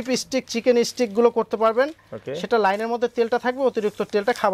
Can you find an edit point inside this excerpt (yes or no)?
no